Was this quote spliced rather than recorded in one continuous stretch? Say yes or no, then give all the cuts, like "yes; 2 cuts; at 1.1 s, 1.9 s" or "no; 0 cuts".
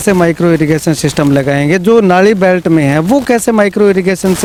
no; 0 cuts